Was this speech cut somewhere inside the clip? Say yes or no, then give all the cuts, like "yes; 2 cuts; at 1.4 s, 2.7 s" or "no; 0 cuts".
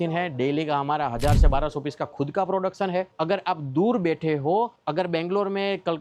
yes; 1 cut; at 3.1 s